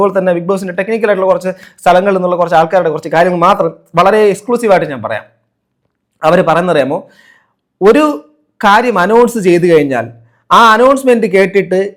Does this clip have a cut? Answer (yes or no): no